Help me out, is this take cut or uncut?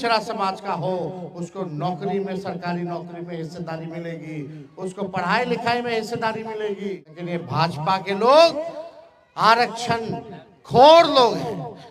cut